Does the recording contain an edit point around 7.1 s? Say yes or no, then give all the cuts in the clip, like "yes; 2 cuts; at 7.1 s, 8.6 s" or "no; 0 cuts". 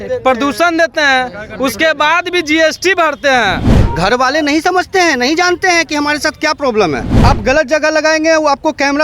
yes; 2 cuts; at 3.7 s, 7.1 s